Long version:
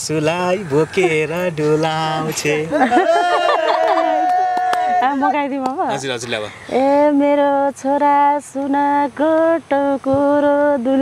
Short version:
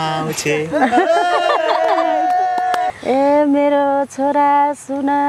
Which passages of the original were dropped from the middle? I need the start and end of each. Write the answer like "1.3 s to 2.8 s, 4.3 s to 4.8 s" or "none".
4.9 s to 6.6 s